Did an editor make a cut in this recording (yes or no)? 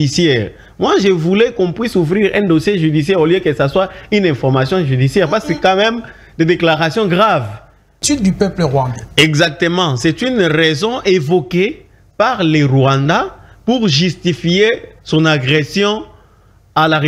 yes